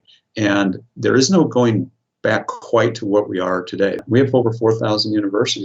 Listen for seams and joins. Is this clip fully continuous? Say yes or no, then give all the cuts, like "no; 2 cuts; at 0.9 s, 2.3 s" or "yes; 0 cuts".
no; 1 cut; at 4.0 s